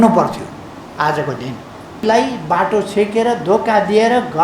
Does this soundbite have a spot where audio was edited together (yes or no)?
yes